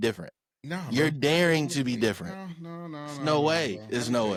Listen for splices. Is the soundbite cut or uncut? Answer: uncut